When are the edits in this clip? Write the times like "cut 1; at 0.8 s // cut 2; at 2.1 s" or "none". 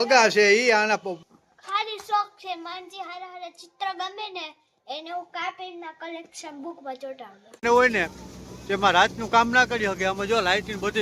cut 1; at 1.2 s // cut 2; at 7.6 s